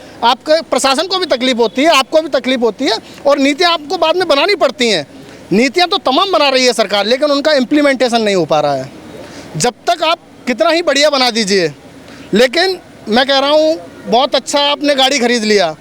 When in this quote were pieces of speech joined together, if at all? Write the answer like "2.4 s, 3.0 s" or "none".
none